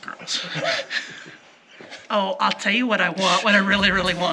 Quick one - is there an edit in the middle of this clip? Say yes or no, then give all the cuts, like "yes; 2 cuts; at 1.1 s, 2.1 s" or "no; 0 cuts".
yes; 1 cut; at 1.9 s